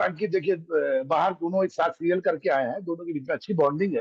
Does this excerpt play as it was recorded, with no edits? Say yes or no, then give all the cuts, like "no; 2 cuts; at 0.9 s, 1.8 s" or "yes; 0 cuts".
yes; 0 cuts